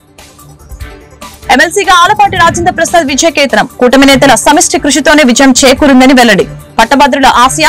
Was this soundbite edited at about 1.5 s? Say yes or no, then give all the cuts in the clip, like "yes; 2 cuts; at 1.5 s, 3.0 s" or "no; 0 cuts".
yes; 1 cut; at 1.5 s